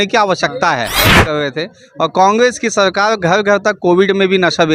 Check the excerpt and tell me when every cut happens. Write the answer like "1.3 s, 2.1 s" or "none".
1.3 s